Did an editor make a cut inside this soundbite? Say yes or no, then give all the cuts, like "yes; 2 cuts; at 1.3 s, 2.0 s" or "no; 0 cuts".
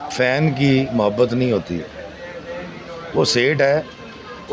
no; 0 cuts